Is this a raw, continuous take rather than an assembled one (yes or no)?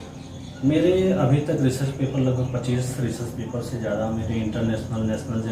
yes